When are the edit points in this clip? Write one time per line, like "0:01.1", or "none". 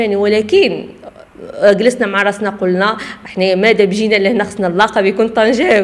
none